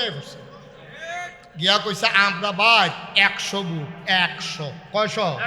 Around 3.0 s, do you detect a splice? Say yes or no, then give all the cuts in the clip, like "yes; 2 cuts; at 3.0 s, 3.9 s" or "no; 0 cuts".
no; 1 cut; at 1.4 s